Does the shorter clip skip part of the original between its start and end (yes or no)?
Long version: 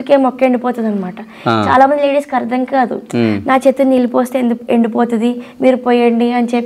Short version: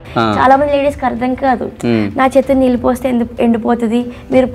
no